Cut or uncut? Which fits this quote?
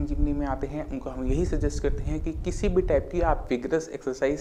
uncut